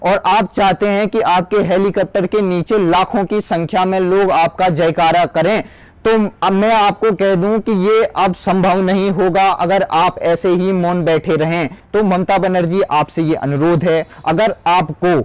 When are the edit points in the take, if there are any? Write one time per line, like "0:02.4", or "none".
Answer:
0:11.8